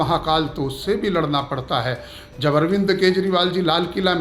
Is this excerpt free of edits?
yes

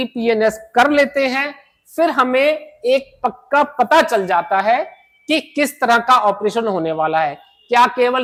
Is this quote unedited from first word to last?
yes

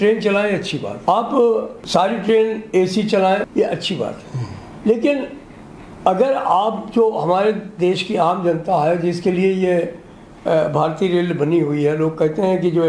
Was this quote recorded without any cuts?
no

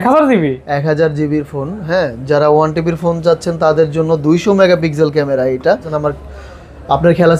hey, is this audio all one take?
no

